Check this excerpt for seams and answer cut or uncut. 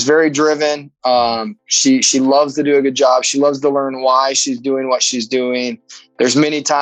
uncut